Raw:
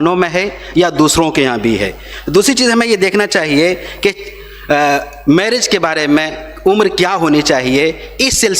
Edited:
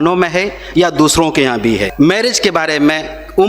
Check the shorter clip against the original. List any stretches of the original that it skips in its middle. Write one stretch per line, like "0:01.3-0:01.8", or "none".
0:01.9-0:05.2